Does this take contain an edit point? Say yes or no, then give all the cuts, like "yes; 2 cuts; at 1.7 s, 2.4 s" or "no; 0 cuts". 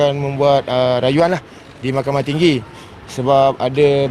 no; 0 cuts